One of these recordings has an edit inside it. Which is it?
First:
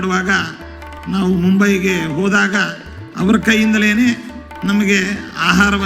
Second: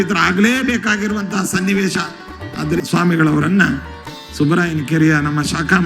second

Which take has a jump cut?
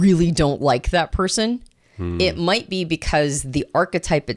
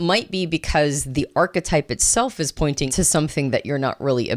second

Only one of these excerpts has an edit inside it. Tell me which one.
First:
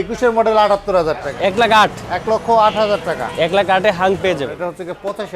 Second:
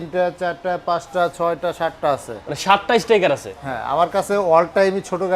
first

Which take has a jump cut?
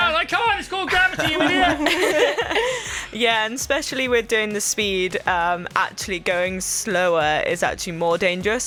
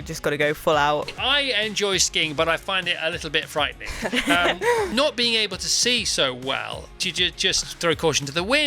second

